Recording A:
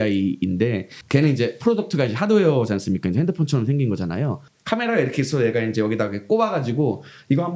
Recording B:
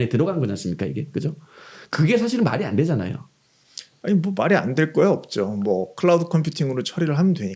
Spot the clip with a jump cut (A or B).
A